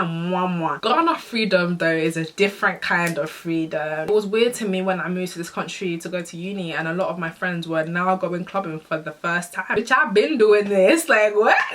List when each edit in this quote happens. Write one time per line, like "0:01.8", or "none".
0:00.8
0:04.1
0:09.7